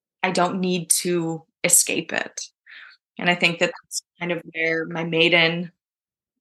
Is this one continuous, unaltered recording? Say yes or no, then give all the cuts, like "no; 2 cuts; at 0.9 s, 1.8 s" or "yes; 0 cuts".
yes; 0 cuts